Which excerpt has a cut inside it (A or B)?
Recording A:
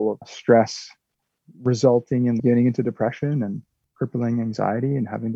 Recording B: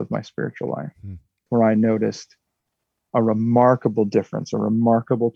B